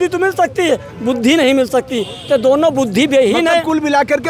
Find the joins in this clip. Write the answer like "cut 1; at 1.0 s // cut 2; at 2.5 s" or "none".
none